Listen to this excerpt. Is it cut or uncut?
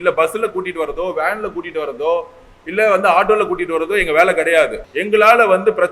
cut